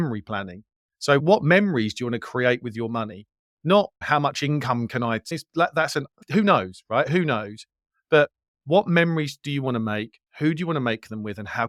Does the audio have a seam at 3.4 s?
no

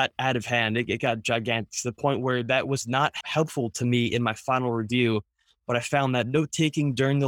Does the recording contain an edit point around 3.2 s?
yes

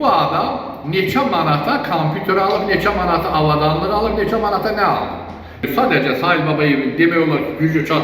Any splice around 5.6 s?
yes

